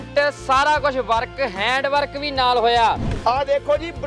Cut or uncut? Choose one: cut